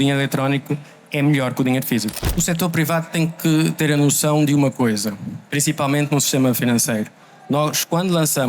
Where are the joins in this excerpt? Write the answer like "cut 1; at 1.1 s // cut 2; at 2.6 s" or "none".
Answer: cut 1; at 2.2 s